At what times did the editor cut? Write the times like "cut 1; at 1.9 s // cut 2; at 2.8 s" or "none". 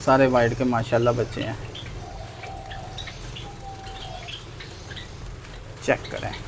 none